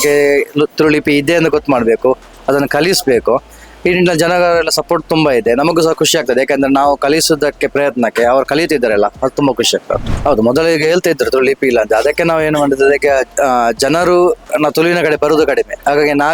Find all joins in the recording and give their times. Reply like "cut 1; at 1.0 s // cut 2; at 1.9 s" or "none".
cut 1; at 10.1 s